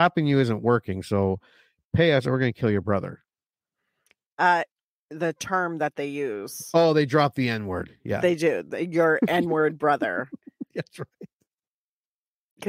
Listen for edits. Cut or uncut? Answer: cut